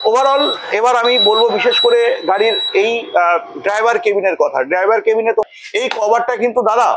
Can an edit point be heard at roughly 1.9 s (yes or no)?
no